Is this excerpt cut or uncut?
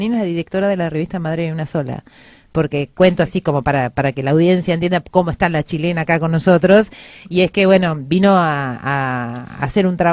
cut